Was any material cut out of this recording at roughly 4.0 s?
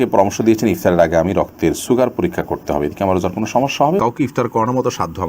yes; 1 cut; at 4.0 s

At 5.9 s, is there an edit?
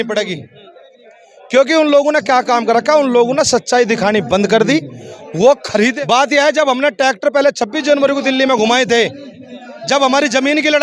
yes; 1 cut; at 5.9 s

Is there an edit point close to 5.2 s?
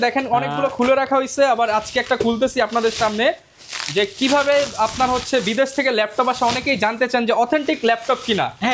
no; 0 cuts

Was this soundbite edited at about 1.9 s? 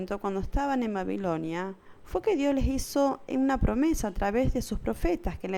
no; 0 cuts

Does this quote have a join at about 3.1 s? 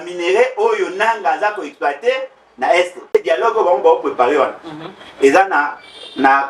yes; 1 cut; at 3.1 s

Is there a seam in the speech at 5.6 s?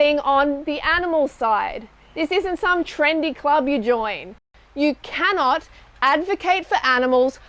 no; 1 cut; at 4.2 s

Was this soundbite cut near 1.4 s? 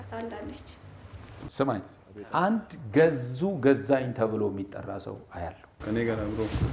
yes; 1 cut; at 1.4 s

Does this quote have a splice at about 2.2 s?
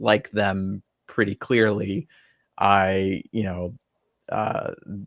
no; 0 cuts

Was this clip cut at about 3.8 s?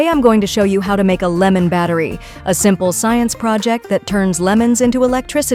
no; 0 cuts

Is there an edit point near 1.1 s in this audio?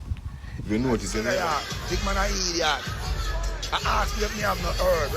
yes; 1 cut; at 1.1 s

